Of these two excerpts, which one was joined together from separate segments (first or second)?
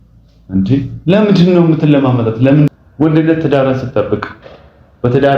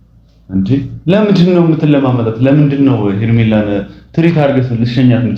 first